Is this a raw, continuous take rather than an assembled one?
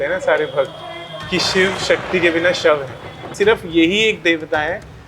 no; 1 cut; at 3.2 s

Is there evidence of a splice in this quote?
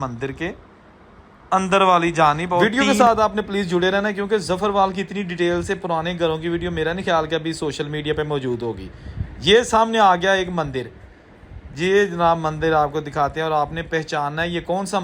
yes; 1 cut; at 2.6 s

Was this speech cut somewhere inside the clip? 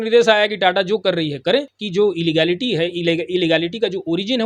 yes; 1 cut; at 1.8 s

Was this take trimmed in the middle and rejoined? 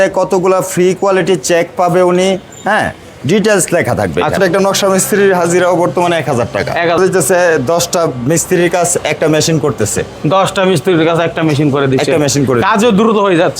yes; 2 cuts; at 4.4 s, 7.0 s

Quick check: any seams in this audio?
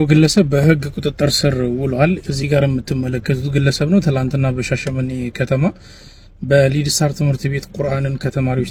no; 0 cuts

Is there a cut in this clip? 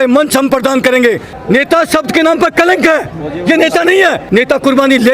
yes; 2 cuts; at 1.3 s, 4.2 s

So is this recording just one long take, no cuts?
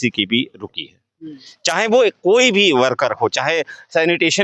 yes; 0 cuts

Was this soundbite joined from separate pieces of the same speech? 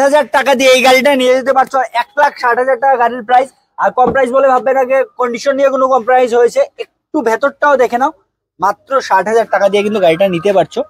no; 0 cuts

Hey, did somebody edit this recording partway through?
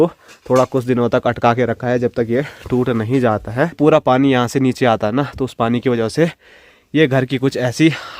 yes; 1 cut; at 3.8 s

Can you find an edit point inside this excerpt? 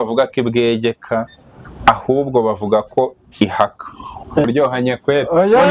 yes; 1 cut; at 4.5 s

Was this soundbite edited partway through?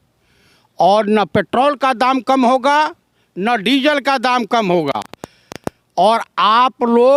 no; 0 cuts

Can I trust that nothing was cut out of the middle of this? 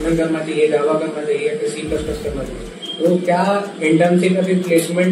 yes; 0 cuts

